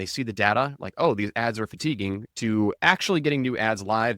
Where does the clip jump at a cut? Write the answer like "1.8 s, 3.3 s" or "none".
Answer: 2.5 s